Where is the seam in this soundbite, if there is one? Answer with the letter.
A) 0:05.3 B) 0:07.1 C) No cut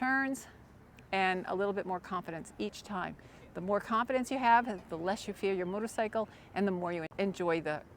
B